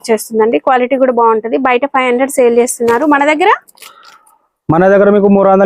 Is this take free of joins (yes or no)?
yes